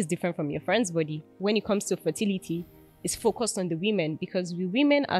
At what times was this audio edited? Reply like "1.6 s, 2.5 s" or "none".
1.3 s